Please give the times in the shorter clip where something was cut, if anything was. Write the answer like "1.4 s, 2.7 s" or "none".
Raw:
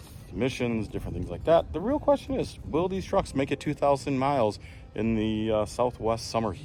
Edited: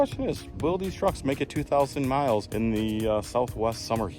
2.5 s